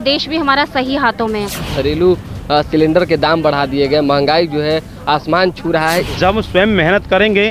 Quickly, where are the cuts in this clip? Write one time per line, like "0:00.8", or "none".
0:01.6
0:06.1